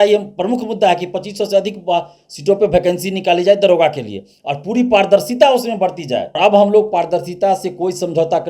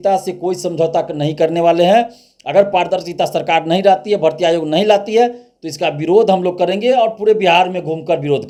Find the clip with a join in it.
first; 1 cut; at 6.4 s

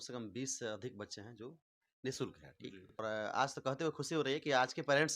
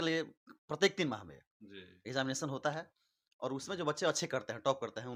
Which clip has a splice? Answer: first; 1 cut; at 3.0 s

